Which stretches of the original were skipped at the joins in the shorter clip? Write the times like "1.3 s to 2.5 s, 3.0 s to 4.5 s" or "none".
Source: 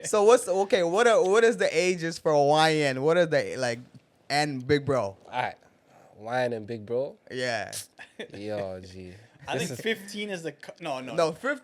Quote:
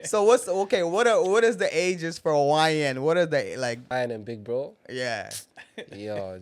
3.8 s to 6.2 s